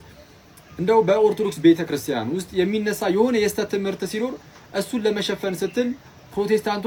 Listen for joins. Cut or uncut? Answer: uncut